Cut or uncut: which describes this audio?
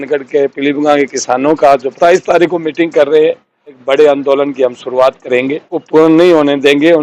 cut